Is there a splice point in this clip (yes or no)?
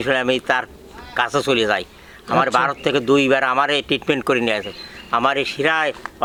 no